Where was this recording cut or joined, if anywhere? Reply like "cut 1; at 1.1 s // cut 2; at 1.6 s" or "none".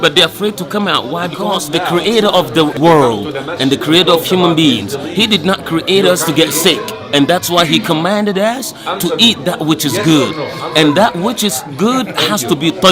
cut 1; at 1.6 s // cut 2; at 2.8 s